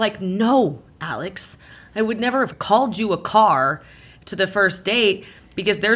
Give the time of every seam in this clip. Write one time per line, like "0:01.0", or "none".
0:02.6